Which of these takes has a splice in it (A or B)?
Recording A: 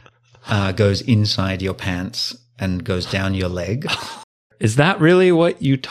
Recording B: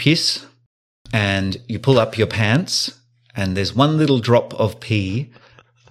A